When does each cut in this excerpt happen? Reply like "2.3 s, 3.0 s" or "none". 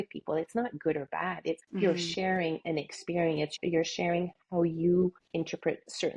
1.7 s, 3.6 s, 5.2 s